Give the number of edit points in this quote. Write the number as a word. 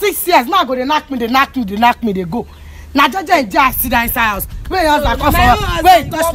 zero